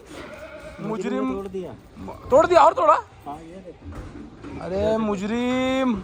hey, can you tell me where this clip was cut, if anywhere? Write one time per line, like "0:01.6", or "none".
none

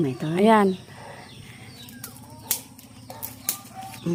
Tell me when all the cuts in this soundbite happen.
none

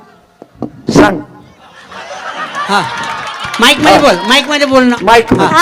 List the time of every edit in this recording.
none

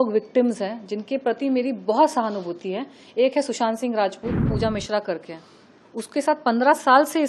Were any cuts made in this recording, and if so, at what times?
0:04.5

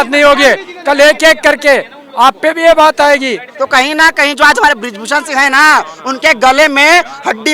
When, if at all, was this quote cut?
0:03.5

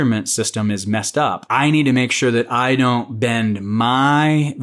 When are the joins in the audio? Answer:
0:01.4

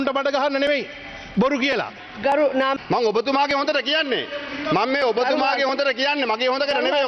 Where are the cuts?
0:02.8

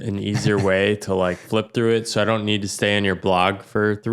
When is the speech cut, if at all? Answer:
none

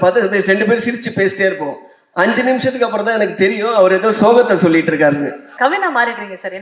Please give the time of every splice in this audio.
0:05.5

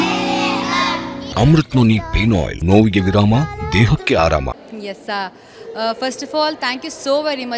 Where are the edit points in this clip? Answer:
0:01.2
0:02.5
0:04.5

